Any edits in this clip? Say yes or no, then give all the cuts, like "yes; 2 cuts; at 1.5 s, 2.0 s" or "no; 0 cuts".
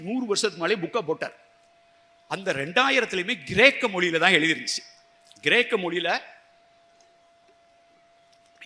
no; 0 cuts